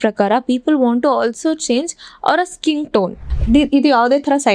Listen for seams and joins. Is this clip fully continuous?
no; 1 cut; at 3.3 s

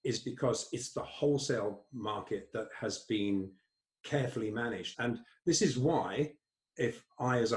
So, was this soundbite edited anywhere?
yes; 1 cut; at 4.9 s

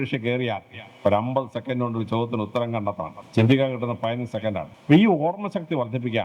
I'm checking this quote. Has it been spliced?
yes; 2 cuts; at 3.2 s, 4.7 s

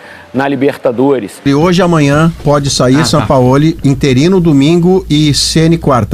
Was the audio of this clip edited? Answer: yes; 1 cut; at 1.4 s

